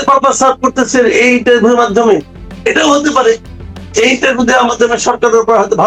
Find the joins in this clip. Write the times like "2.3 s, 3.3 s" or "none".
none